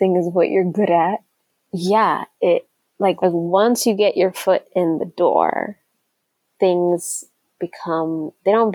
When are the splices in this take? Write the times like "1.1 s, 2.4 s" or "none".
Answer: none

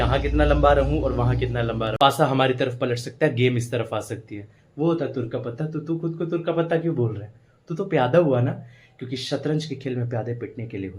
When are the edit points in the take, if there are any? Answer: 1.9 s

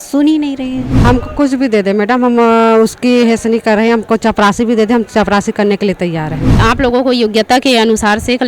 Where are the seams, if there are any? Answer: 0.9 s, 6.6 s

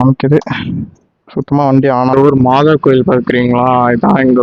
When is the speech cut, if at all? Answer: 2.1 s

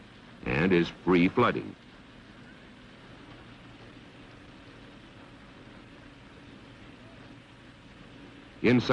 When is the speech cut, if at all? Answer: none

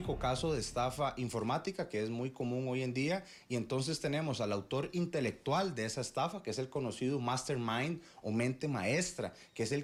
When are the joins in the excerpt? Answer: none

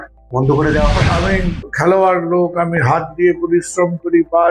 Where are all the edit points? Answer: 1.0 s

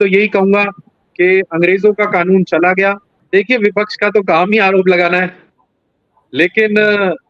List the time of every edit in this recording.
3.1 s

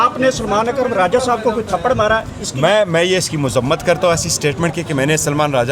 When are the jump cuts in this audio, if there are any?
none

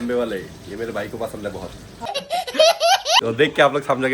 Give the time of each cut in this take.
2.0 s, 3.2 s

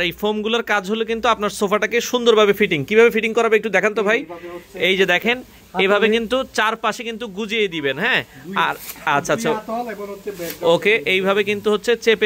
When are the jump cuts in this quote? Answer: none

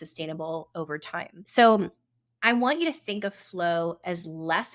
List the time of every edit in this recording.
1.4 s

